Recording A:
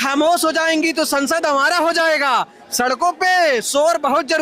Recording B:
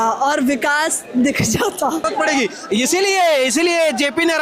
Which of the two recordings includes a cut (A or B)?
B